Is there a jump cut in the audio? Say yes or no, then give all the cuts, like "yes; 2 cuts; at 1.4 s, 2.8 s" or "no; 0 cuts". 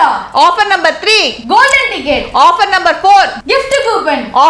yes; 2 cuts; at 1.4 s, 3.4 s